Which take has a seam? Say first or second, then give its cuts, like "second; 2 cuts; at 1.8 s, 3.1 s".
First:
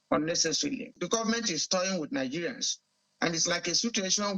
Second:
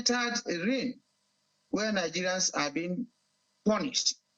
first; 1 cut; at 0.9 s